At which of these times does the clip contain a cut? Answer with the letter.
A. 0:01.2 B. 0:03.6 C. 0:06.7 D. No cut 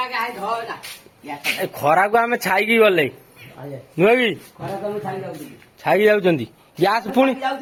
D